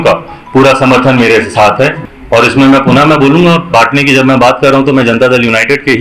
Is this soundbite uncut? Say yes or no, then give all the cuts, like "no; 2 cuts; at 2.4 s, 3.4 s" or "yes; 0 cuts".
no; 1 cut; at 2.0 s